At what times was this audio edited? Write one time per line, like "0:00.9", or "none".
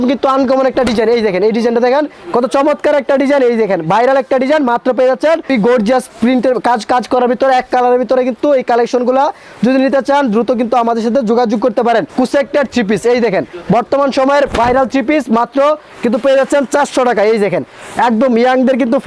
0:05.5
0:12.1